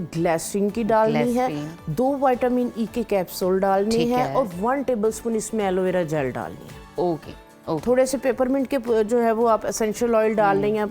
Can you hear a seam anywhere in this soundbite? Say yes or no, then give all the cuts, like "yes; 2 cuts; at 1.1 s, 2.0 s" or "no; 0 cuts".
no; 0 cuts